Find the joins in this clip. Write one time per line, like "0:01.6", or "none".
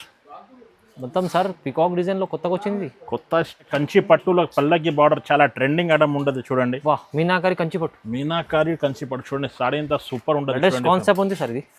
0:03.7